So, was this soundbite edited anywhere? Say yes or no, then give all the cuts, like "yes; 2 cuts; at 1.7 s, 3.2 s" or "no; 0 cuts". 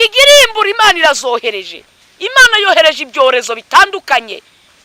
no; 0 cuts